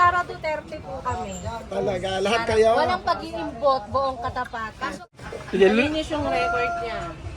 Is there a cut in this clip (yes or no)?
yes